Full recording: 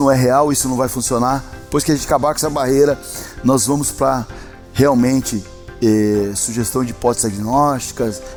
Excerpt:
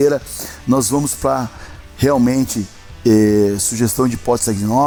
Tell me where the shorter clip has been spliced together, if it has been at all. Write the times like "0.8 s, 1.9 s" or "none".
none